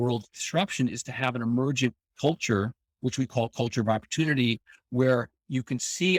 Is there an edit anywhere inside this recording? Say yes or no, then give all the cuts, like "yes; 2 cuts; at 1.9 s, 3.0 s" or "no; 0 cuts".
no; 0 cuts